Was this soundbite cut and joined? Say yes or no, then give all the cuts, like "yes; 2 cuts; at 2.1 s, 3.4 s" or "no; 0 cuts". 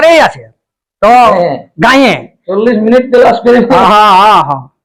no; 0 cuts